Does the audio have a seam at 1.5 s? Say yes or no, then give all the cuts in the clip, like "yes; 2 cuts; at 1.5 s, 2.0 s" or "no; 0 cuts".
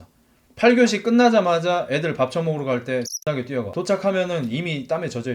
no; 1 cut; at 3.7 s